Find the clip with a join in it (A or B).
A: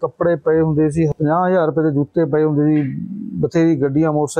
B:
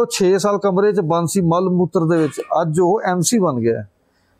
A